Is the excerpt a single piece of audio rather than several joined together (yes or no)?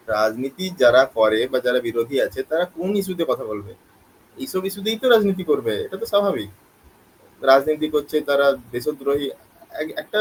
yes